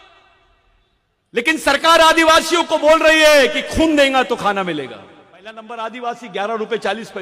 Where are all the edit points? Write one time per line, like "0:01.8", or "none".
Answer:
0:05.6

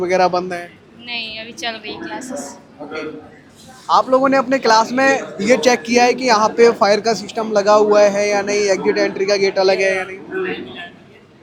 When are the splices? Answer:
none

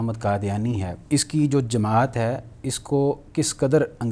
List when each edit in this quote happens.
0:00.9

